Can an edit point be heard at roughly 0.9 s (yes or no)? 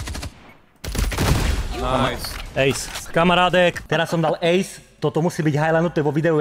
no